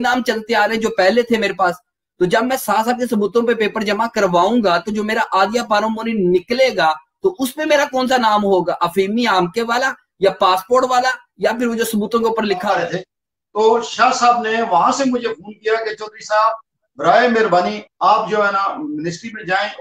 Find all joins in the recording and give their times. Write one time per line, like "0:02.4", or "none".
0:12.8